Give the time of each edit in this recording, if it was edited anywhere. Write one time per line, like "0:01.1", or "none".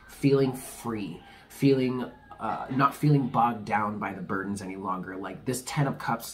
none